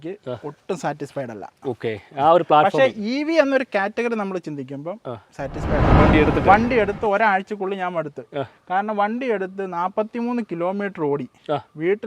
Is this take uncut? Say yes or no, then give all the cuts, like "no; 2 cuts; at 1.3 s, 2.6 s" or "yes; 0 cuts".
no; 1 cut; at 5.9 s